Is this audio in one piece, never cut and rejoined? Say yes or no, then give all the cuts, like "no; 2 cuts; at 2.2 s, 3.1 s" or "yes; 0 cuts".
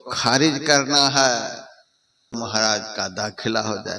no; 1 cut; at 2.3 s